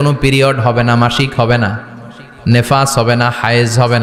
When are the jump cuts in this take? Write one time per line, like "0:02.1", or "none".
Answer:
none